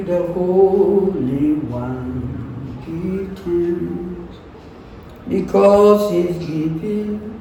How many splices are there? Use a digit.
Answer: 0